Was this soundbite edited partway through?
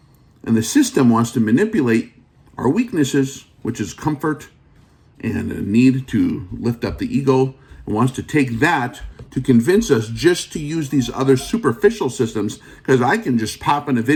no; 0 cuts

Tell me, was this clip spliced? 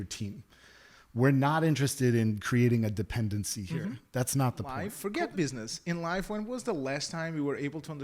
yes; 1 cut; at 4.9 s

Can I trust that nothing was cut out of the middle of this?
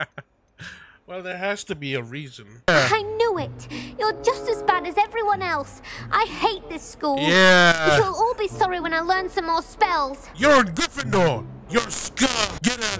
no; 1 cut; at 2.5 s

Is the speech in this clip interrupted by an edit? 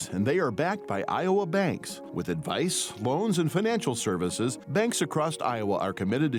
no; 0 cuts

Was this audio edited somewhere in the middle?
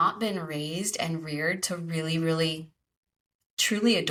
no; 0 cuts

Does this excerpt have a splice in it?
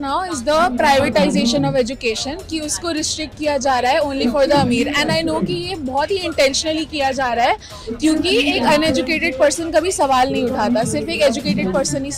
no; 0 cuts

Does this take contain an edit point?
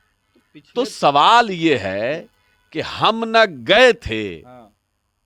no; 0 cuts

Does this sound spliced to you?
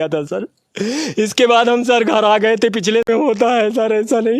yes; 1 cut; at 3.0 s

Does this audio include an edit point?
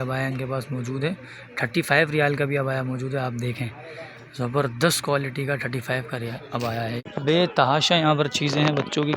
yes; 1 cut; at 7.0 s

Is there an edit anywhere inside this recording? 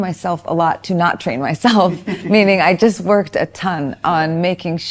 no; 0 cuts

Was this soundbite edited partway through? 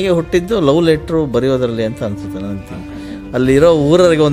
no; 0 cuts

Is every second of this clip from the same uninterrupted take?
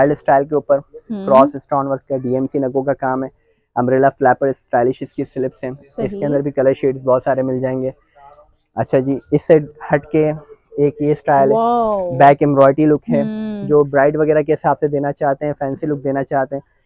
yes; 0 cuts

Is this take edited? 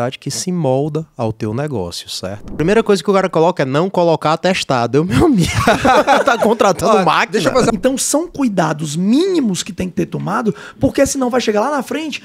yes; 2 cuts; at 2.6 s, 7.7 s

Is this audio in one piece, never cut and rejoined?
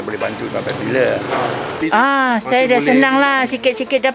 no; 1 cut; at 1.8 s

